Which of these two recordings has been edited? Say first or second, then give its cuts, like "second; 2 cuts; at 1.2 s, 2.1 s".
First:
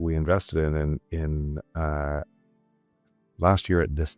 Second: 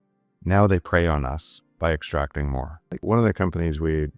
second; 1 cut; at 3.0 s